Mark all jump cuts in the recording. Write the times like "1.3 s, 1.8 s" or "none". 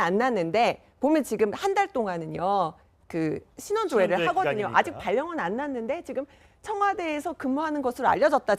4.5 s